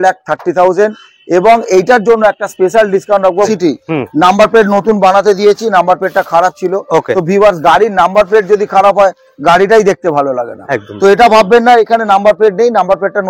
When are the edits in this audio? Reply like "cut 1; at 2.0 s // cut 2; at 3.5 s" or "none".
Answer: cut 1; at 3.5 s

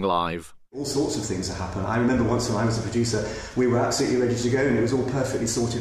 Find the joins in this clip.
cut 1; at 1.9 s

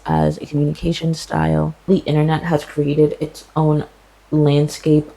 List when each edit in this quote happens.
cut 1; at 1.9 s

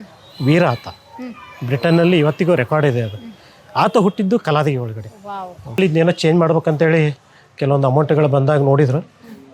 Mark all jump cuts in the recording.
cut 1; at 5.8 s

